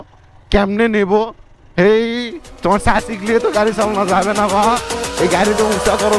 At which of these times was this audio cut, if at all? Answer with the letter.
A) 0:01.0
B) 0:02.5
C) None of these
C